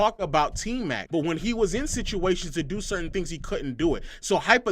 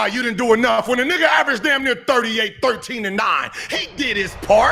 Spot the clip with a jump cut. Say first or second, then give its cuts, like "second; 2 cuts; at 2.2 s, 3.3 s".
first; 1 cut; at 1.0 s